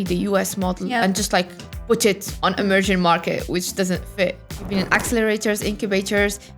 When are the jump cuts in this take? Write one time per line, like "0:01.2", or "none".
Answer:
0:04.5